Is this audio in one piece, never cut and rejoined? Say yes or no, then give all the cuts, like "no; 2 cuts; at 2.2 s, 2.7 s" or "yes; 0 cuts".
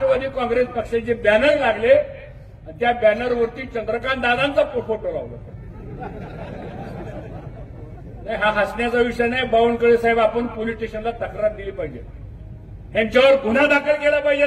yes; 0 cuts